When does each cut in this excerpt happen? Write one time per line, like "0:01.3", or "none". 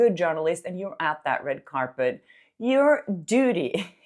none